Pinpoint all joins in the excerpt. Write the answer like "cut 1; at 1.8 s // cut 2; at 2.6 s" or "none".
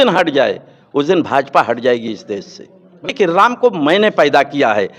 cut 1; at 3.1 s